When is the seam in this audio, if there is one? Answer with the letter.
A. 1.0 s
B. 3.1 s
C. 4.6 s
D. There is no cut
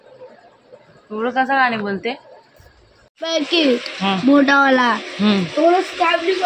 B